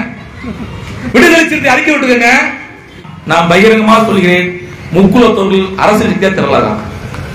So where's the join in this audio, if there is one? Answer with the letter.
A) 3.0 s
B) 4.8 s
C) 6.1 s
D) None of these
A